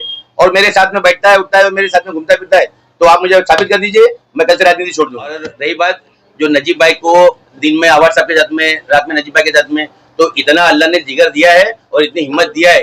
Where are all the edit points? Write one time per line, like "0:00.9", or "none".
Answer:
0:05.5